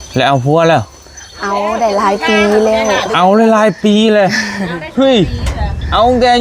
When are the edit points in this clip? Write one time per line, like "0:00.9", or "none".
none